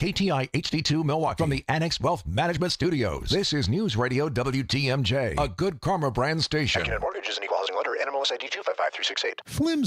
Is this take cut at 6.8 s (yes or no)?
yes